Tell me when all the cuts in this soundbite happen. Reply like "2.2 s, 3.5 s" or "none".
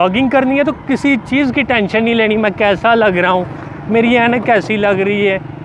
none